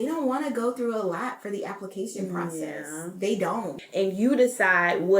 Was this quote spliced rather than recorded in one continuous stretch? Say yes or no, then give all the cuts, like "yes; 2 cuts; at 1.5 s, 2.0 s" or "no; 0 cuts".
yes; 1 cut; at 3.7 s